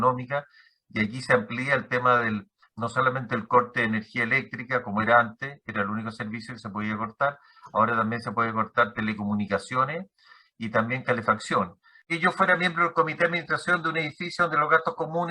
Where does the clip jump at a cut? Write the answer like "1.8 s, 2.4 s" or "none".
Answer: 12.1 s